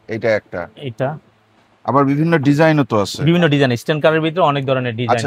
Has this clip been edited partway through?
no; 0 cuts

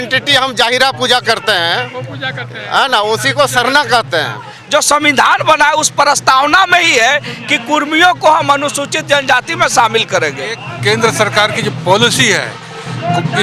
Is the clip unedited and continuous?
no; 2 cuts; at 4.5 s, 10.7 s

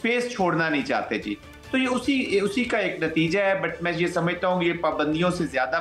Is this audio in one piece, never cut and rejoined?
yes; 0 cuts

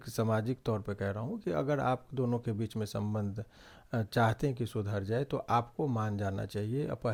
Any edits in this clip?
no; 0 cuts

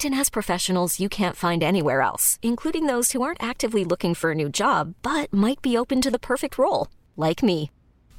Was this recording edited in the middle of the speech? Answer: no; 0 cuts

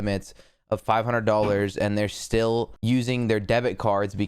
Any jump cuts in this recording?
yes; 1 cut; at 2.7 s

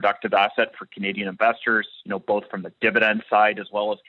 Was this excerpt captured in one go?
yes; 0 cuts

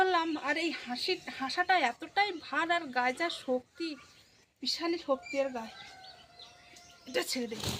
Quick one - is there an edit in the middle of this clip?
no; 0 cuts

